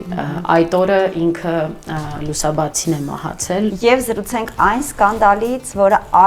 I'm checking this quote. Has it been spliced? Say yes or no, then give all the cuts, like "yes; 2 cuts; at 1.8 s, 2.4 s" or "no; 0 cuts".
yes; 1 cut; at 3.7 s